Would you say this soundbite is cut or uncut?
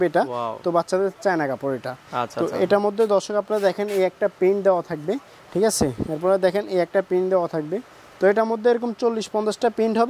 uncut